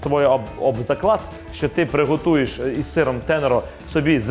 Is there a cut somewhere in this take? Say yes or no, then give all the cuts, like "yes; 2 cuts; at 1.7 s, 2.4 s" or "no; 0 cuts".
no; 0 cuts